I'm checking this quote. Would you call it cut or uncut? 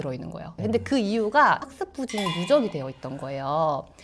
uncut